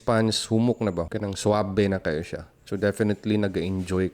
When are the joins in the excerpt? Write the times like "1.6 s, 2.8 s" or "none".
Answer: none